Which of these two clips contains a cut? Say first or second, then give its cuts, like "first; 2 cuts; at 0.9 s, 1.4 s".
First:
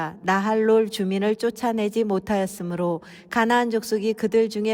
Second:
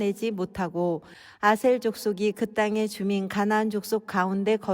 second; 1 cut; at 1.1 s